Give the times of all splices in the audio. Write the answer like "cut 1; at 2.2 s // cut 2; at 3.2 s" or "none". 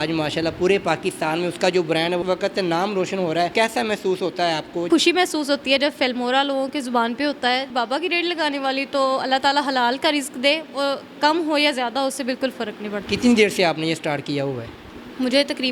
cut 1; at 2.2 s // cut 2; at 3.5 s // cut 3; at 4.9 s // cut 4; at 7.7 s // cut 5; at 13.1 s